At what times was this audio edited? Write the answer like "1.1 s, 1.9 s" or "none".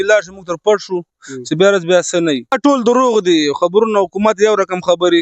2.6 s